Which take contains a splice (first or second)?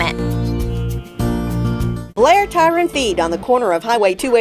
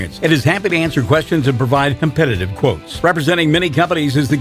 first